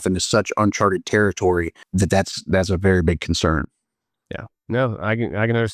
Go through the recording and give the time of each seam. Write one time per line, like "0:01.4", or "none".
0:01.8